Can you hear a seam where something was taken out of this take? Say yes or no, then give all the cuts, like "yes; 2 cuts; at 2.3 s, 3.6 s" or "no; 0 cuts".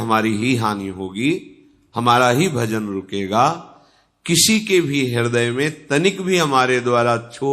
no; 0 cuts